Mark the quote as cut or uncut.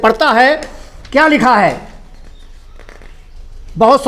uncut